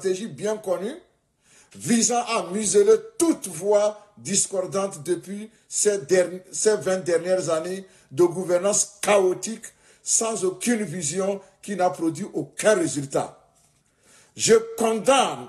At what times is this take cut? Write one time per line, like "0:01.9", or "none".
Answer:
none